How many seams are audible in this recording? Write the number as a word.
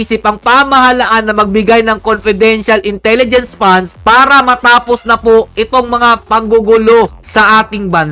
zero